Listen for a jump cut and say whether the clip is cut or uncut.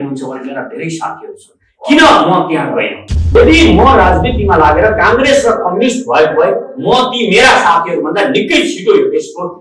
cut